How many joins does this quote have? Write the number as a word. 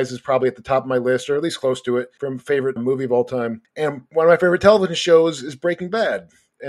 two